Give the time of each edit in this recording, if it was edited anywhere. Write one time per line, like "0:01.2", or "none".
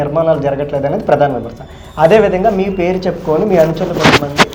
none